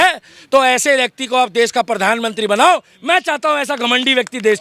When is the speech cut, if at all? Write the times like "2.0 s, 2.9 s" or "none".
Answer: none